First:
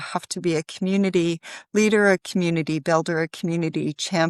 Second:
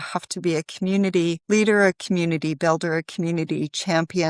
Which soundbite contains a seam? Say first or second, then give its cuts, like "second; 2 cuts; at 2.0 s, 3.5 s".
second; 1 cut; at 1.4 s